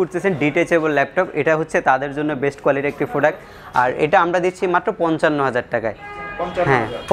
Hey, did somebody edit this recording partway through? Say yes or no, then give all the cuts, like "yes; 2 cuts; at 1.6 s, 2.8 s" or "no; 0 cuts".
yes; 1 cut; at 3.5 s